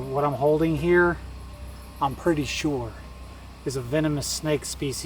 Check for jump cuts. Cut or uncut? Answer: uncut